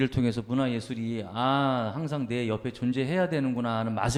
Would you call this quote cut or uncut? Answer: uncut